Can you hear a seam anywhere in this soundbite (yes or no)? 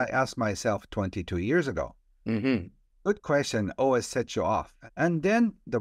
yes